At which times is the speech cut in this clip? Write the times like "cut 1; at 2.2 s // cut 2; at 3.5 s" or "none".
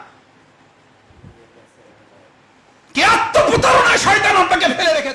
none